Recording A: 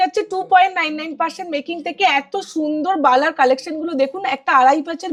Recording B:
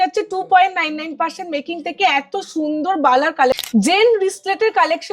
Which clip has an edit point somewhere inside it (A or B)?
B